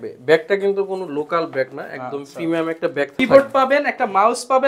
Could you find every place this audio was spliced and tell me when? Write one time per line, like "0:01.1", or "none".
0:03.2